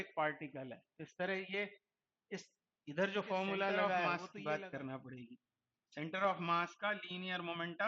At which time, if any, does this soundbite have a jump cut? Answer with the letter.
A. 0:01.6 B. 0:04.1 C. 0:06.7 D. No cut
B